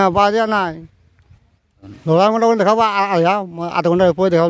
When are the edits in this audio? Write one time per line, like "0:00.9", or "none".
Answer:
0:01.9